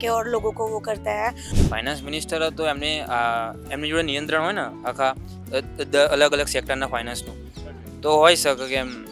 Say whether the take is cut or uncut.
cut